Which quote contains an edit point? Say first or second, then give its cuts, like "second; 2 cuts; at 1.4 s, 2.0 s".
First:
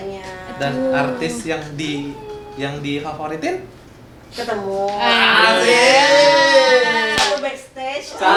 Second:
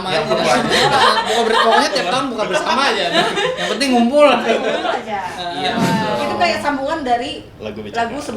second; 1 cut; at 5.8 s